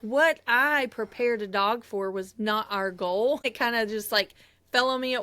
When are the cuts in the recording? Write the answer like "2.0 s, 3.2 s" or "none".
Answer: 3.4 s

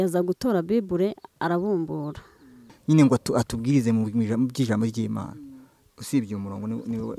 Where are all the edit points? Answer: 2.7 s

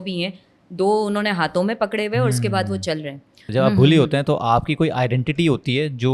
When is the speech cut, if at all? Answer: 3.4 s

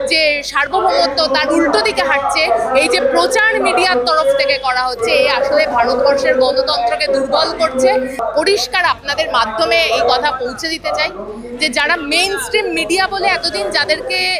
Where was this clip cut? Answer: 8.2 s

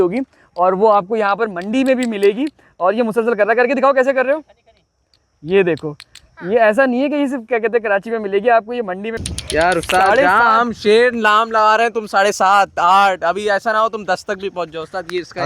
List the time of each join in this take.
9.2 s

